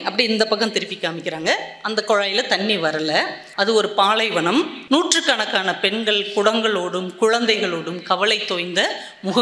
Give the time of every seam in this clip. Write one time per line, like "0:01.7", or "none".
0:03.4
0:04.8